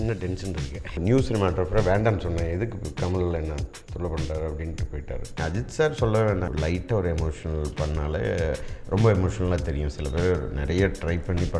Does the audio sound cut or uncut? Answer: cut